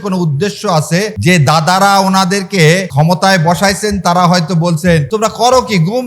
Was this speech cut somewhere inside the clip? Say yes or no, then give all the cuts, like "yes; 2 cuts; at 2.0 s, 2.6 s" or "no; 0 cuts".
yes; 3 cuts; at 1.1 s, 2.9 s, 5.1 s